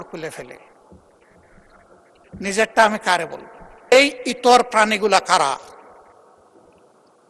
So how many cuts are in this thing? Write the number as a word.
one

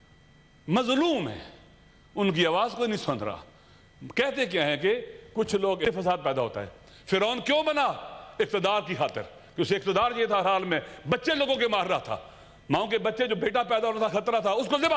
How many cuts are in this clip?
one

